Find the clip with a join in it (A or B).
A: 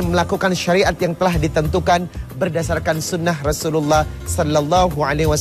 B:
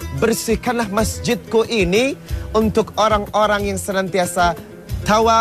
B